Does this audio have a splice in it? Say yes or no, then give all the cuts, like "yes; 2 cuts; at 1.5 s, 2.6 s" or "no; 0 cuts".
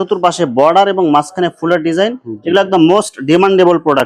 no; 0 cuts